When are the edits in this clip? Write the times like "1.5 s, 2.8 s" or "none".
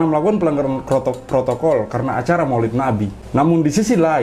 3.2 s